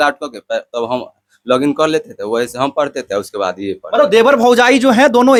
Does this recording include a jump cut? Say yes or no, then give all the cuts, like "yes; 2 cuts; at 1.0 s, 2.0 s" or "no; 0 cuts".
no; 0 cuts